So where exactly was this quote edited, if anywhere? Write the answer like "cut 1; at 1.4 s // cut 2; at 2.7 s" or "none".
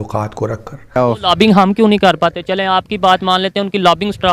cut 1; at 1.0 s